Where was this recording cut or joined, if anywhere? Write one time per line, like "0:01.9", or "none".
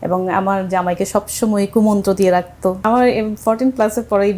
0:02.8